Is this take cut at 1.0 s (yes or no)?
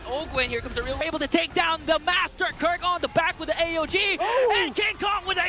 yes